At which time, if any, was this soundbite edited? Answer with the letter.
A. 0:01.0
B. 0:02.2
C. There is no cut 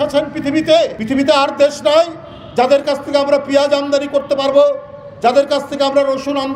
A